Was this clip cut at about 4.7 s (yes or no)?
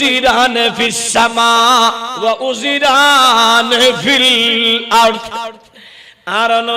no